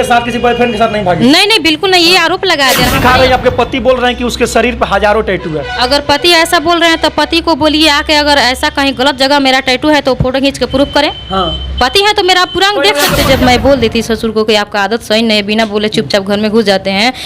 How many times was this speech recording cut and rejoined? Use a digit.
2